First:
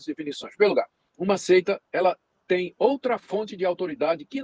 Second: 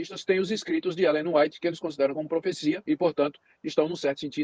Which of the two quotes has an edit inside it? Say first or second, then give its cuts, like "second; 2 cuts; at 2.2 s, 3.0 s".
second; 1 cut; at 2.8 s